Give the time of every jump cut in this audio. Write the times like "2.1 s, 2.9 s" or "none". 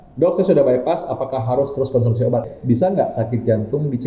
2.5 s